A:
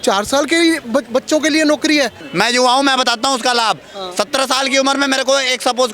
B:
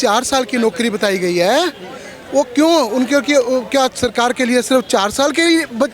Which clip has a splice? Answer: A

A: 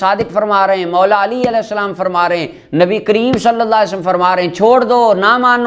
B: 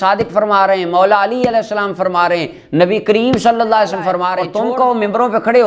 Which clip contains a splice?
B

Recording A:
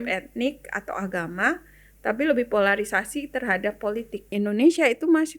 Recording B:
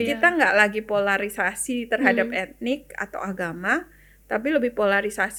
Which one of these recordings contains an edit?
A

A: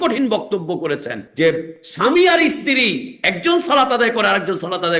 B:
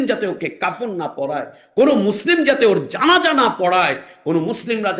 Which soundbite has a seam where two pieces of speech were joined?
A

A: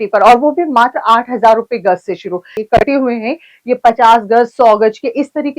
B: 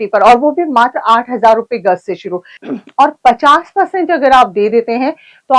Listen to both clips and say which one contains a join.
B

